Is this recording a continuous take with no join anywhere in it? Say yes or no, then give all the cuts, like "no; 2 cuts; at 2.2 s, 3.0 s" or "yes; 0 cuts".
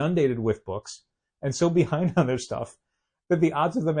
yes; 0 cuts